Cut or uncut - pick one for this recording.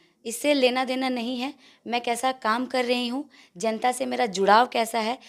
uncut